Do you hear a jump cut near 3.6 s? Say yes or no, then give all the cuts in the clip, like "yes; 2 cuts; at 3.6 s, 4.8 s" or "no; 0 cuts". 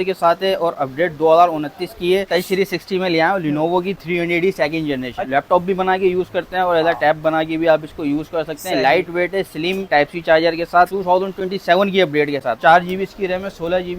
no; 5 cuts; at 2.3 s, 5.2 s, 9.9 s, 10.9 s, 12.6 s